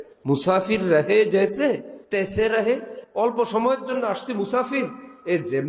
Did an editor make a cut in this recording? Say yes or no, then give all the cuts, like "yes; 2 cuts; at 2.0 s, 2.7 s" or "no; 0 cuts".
yes; 2 cuts; at 1.9 s, 3.0 s